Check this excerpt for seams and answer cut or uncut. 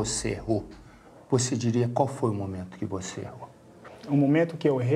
cut